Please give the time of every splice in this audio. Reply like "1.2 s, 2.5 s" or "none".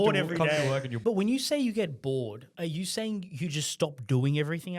0.9 s, 2.4 s

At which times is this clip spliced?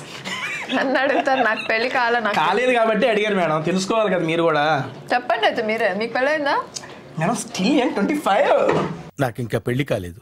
none

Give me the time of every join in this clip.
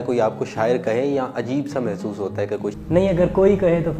2.8 s

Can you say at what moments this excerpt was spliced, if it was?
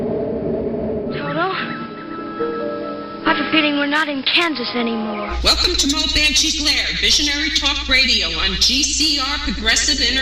1.1 s

